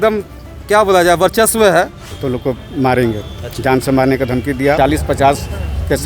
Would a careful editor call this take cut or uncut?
cut